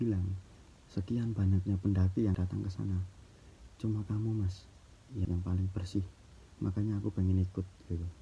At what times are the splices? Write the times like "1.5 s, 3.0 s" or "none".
2.4 s, 5.3 s